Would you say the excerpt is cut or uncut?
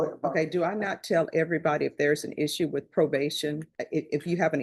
cut